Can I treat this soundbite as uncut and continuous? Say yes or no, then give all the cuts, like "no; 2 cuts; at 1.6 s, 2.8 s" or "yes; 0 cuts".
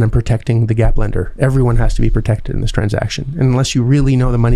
yes; 0 cuts